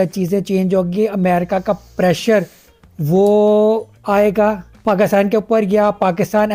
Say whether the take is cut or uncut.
uncut